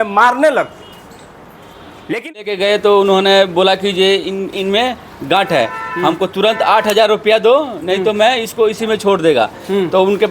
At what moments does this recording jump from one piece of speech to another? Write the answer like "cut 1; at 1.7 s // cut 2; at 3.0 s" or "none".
cut 1; at 2.3 s